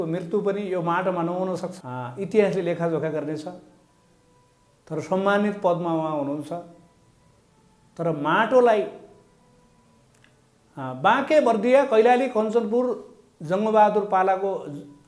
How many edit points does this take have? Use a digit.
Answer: 1